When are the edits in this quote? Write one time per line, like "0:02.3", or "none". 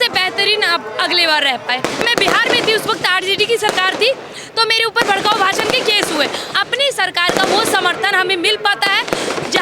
0:02.0
0:06.5